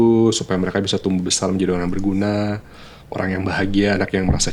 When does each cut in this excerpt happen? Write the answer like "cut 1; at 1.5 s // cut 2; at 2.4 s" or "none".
none